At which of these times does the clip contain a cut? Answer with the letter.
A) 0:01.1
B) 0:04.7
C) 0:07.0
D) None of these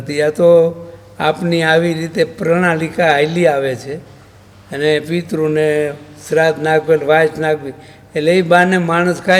D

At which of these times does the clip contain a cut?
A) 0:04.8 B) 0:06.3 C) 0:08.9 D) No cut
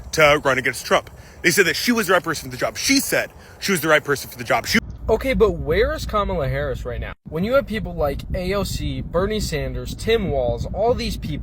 A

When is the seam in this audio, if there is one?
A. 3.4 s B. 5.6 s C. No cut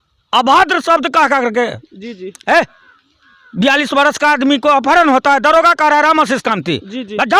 C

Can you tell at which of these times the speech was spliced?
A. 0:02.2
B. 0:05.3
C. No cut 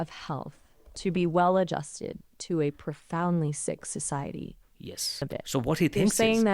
B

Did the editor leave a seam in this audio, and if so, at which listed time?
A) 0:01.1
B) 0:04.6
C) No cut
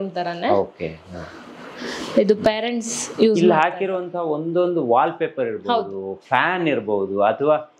C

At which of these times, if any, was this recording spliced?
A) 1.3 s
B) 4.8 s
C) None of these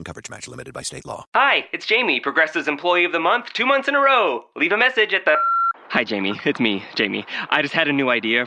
A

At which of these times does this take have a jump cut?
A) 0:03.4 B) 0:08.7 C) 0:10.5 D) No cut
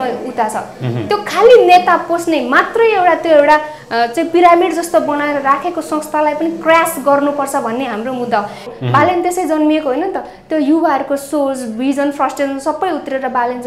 B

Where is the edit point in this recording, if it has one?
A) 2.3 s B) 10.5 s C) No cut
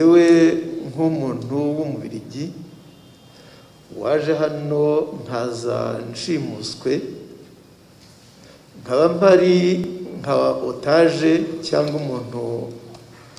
C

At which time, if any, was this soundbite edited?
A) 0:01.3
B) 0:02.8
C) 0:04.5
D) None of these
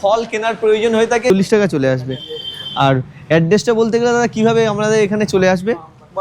A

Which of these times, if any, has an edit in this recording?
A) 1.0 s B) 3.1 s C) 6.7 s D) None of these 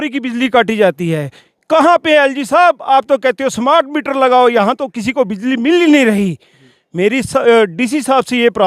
D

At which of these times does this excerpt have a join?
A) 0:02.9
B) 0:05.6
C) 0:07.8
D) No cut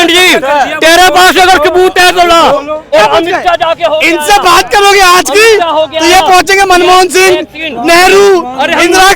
A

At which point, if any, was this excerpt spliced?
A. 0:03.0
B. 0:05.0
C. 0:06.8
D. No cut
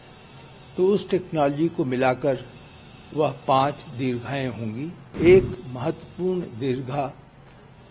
B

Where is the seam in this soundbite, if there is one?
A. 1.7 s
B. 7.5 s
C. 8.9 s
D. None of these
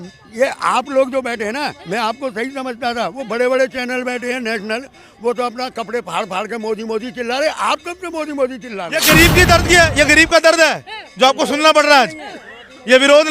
C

